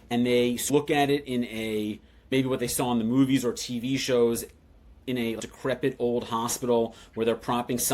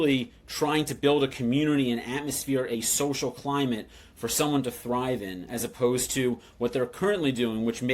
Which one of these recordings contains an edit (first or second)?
first